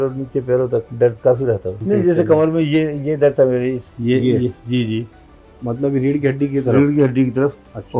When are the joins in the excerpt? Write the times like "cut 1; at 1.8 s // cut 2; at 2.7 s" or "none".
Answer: cut 1; at 0.9 s // cut 2; at 1.7 s // cut 3; at 3.9 s